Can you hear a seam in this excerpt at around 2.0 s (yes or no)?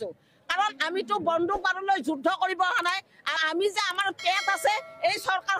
no